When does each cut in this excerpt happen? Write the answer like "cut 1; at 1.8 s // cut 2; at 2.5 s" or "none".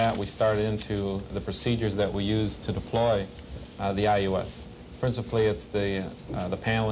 none